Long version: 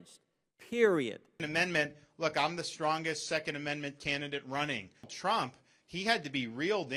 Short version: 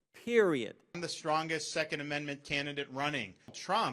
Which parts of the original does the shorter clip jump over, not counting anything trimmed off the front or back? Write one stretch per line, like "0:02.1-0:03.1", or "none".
0:01.4-0:02.5